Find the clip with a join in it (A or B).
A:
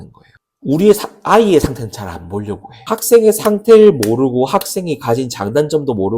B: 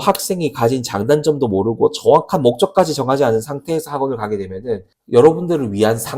A